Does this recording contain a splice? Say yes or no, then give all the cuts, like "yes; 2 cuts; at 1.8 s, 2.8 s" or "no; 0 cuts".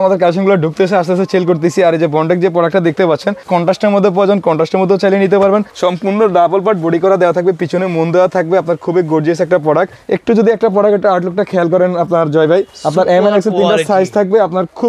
yes; 4 cuts; at 3.4 s, 5.7 s, 10.0 s, 12.8 s